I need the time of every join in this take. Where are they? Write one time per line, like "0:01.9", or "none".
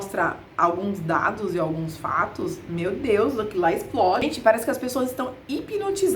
0:04.2